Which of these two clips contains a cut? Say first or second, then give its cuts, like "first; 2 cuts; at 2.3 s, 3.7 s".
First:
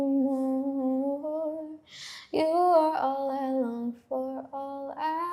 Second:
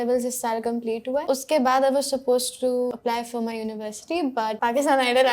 second; 3 cuts; at 1.2 s, 2.9 s, 4.6 s